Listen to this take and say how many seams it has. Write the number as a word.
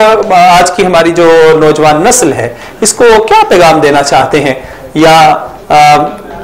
zero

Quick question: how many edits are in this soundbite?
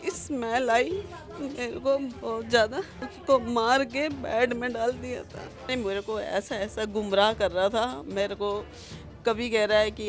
two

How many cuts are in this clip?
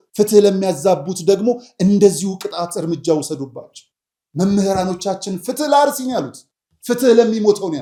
zero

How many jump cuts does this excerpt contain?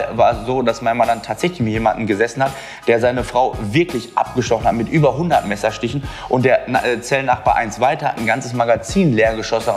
zero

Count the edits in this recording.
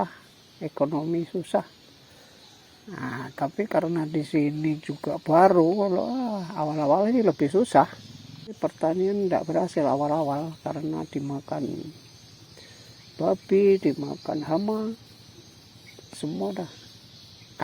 two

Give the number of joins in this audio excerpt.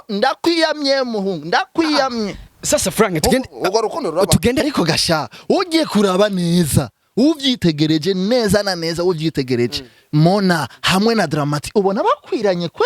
one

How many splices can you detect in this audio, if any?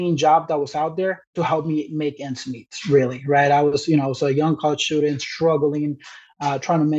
zero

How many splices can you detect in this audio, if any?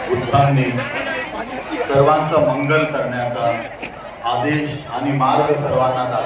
zero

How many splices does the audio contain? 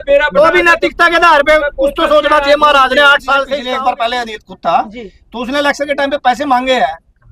one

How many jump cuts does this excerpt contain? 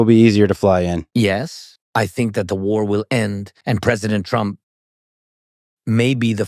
one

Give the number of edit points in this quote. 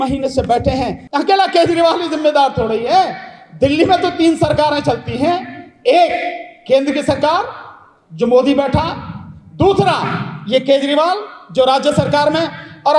one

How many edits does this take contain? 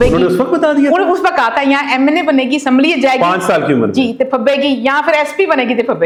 zero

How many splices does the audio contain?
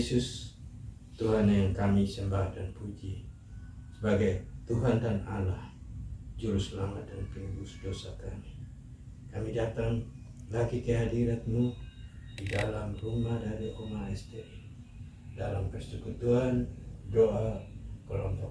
zero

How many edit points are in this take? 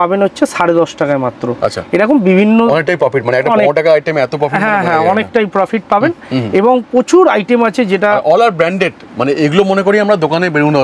zero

